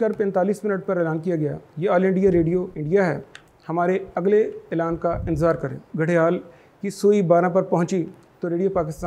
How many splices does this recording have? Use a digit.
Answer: 2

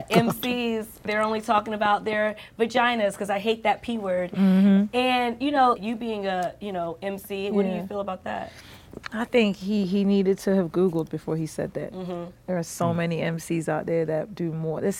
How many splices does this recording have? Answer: 1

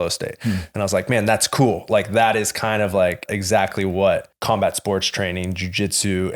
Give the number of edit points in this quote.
2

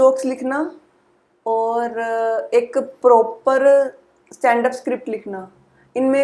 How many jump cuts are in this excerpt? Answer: 0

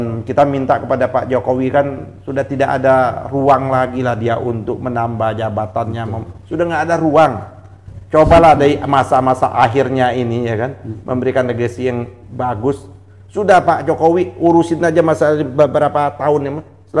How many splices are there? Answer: 0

